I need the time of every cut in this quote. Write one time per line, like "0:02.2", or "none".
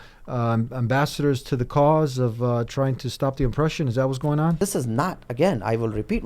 0:04.6